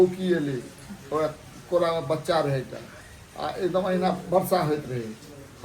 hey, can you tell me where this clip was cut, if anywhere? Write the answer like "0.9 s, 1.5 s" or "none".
none